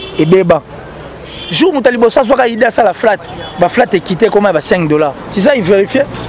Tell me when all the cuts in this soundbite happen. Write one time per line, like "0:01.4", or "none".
0:05.2